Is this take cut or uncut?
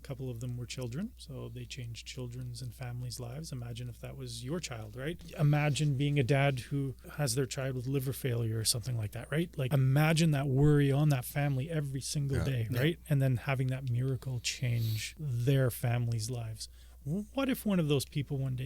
cut